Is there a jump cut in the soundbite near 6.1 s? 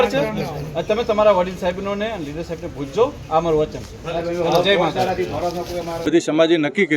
yes; 1 cut; at 6.1 s

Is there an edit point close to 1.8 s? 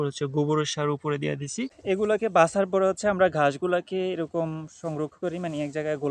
yes; 1 cut; at 1.8 s

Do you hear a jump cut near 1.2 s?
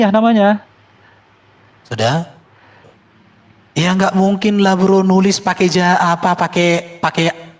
no; 1 cut; at 2.9 s

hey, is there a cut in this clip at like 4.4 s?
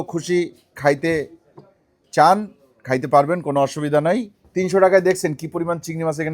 yes; 1 cut; at 4.4 s

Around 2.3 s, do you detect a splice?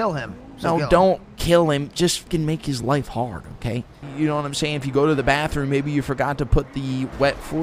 yes; 2 cuts; at 2.3 s, 4.0 s

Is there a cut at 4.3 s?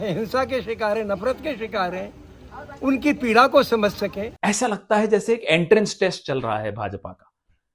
yes; 1 cut; at 4.3 s

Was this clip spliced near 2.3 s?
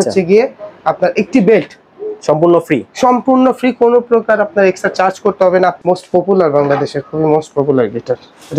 no; 1 cut; at 5.8 s

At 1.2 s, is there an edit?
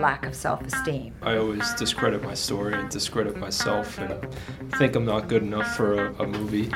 yes; 1 cut; at 1.2 s

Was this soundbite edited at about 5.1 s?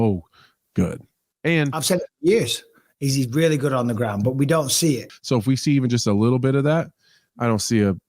yes; 1 cut; at 5.1 s

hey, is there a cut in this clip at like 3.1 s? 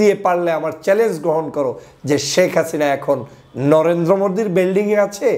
no; 0 cuts

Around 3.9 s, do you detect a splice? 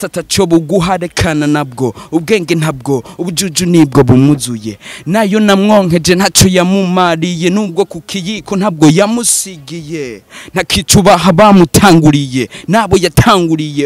no; 0 cuts

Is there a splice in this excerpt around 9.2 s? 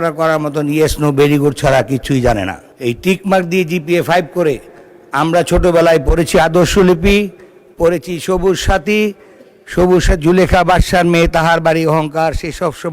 no; 1 cut; at 2.6 s

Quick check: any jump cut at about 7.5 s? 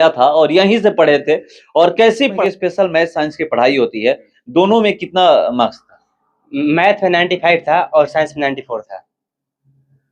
no; 1 cut; at 2.4 s

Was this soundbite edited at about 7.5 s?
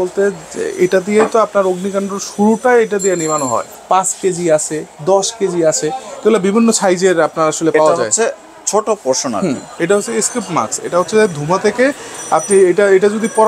no; 2 cuts; at 3.7 s, 9.7 s

